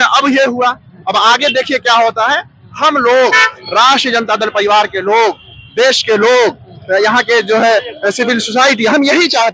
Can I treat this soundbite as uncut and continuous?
yes; 0 cuts

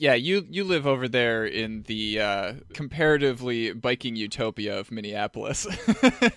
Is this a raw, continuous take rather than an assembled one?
yes; 0 cuts

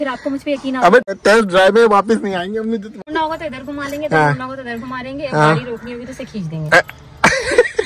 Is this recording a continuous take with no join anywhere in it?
no; 2 cuts; at 1.1 s, 3.1 s

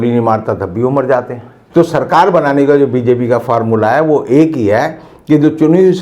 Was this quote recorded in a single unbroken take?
no; 1 cut; at 1.5 s

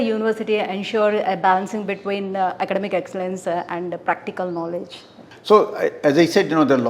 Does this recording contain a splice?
no; 0 cuts

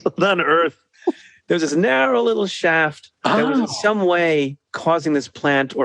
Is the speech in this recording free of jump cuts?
no; 2 cuts; at 3.0 s, 4.6 s

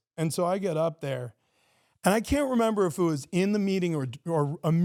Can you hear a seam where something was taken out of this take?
no; 0 cuts

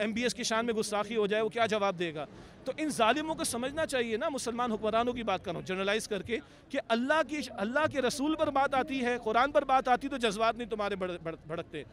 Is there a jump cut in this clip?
no; 0 cuts

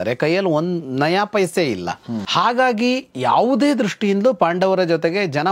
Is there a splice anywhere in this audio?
yes; 1 cut; at 2.2 s

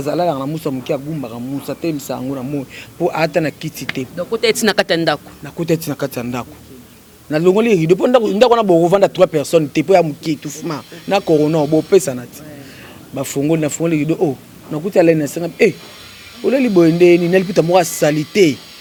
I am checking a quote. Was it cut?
no; 0 cuts

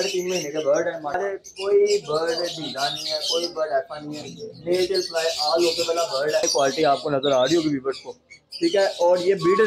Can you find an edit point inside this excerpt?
yes; 2 cuts; at 1.2 s, 6.5 s

